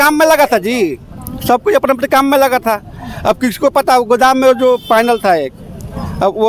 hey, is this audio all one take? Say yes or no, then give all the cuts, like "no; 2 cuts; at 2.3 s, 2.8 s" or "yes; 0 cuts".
yes; 0 cuts